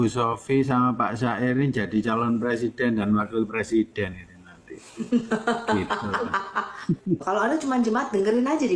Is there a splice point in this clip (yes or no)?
yes